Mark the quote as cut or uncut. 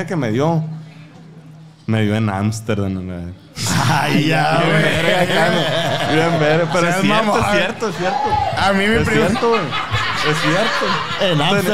uncut